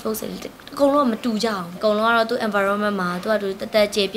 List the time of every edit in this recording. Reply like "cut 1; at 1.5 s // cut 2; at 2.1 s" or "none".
cut 1; at 1.8 s